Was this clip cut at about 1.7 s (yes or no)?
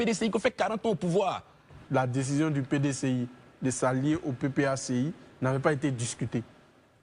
yes